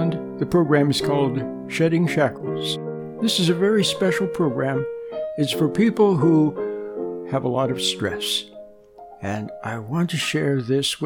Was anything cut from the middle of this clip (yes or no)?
no